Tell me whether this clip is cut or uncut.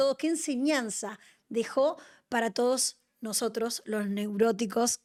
uncut